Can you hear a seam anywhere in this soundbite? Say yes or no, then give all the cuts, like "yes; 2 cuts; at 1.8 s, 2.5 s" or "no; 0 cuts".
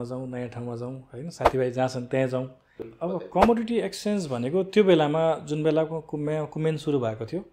yes; 1 cut; at 2.8 s